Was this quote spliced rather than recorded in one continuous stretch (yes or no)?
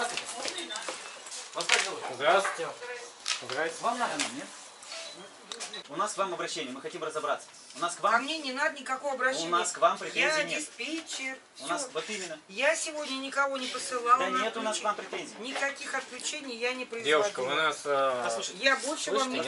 yes